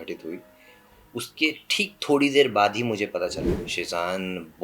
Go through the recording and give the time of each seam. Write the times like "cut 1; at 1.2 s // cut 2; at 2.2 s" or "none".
cut 1; at 3.5 s

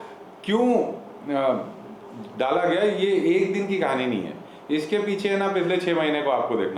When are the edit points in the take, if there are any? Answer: none

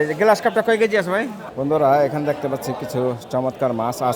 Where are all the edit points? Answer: cut 1; at 1.4 s

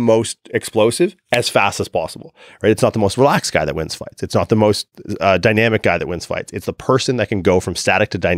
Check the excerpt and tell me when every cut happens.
none

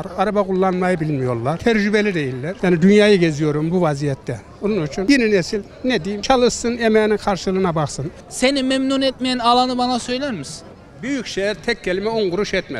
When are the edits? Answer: cut 1; at 2.5 s // cut 2; at 8.0 s

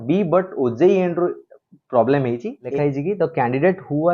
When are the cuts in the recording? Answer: cut 1; at 2.6 s

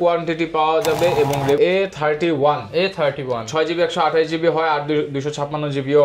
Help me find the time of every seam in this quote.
cut 1; at 1.6 s

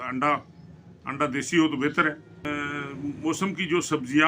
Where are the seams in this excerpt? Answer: cut 1; at 2.5 s

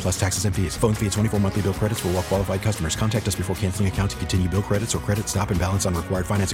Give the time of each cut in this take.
none

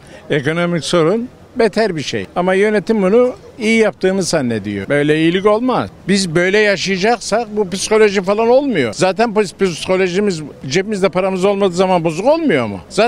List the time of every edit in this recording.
cut 1; at 5.9 s

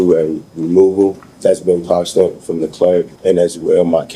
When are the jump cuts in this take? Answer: cut 1; at 1.3 s // cut 2; at 3.1 s

